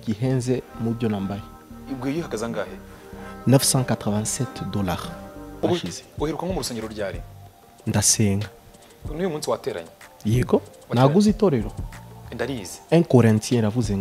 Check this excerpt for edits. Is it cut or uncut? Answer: cut